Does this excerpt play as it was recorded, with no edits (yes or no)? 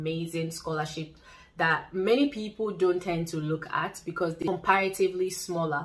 no